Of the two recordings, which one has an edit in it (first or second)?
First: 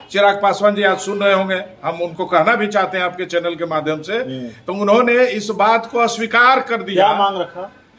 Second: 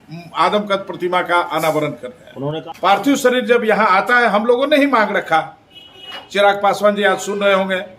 second